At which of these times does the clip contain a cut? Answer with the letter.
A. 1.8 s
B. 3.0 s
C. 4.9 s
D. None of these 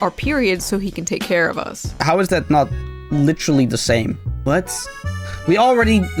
D